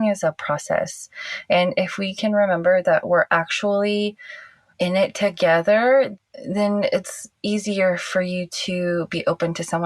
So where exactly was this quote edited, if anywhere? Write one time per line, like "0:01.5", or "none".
0:06.1